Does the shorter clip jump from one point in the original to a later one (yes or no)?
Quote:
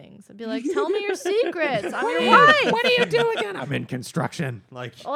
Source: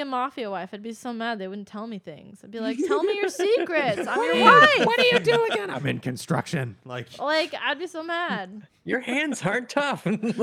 no